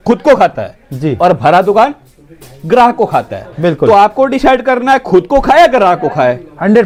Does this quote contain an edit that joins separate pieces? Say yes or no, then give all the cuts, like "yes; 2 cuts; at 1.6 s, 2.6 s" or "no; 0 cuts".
no; 0 cuts